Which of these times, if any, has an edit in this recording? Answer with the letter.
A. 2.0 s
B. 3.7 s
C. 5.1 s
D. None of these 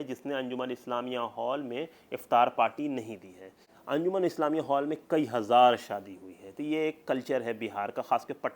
B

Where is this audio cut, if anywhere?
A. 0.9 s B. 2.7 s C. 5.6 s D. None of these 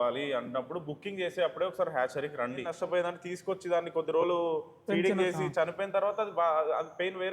B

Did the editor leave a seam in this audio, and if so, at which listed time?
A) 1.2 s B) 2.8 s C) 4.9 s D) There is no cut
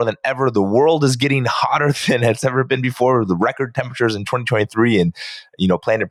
D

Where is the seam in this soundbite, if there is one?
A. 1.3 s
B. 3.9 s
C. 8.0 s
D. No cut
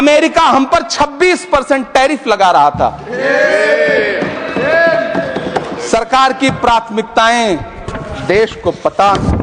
D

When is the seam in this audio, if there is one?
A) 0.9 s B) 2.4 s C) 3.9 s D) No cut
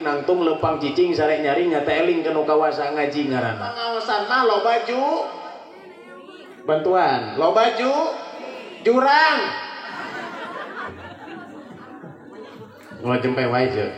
C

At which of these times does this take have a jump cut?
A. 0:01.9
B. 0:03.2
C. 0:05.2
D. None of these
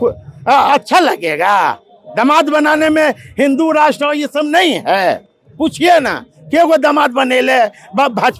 D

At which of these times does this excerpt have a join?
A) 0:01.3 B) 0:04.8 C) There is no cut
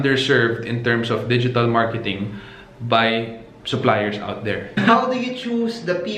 B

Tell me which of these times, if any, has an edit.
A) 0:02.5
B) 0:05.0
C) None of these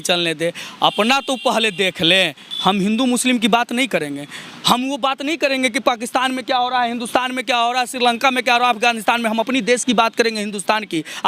A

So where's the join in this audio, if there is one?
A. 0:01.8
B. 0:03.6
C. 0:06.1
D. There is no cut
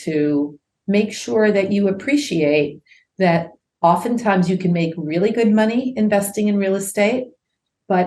B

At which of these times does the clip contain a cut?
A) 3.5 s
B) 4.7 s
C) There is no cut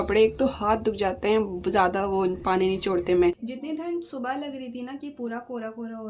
A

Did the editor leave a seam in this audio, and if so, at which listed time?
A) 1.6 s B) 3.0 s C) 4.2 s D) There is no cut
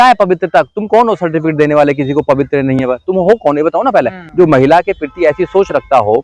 C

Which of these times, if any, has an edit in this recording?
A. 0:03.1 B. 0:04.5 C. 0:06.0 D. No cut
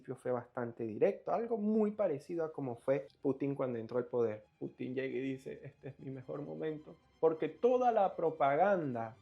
B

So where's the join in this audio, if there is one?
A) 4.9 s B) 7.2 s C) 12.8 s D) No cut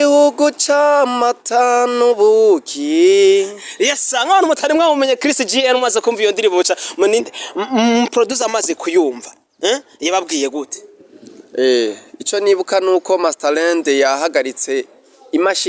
B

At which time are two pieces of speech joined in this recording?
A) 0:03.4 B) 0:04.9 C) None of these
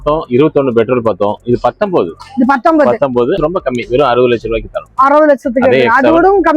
A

